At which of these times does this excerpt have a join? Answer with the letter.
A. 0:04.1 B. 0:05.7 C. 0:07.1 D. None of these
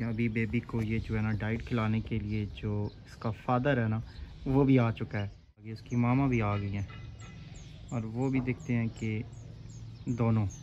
B